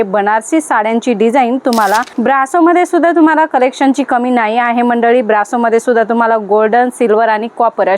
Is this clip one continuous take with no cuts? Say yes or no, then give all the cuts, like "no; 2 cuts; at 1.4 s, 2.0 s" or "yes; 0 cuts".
no; 1 cut; at 2.1 s